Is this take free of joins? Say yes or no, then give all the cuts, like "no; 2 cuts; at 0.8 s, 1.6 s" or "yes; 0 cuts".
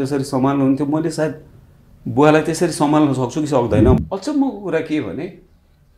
no; 1 cut; at 4.0 s